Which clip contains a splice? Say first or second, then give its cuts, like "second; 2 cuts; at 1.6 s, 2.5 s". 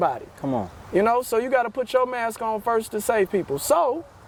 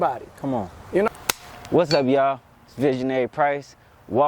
second; 1 cut; at 1.1 s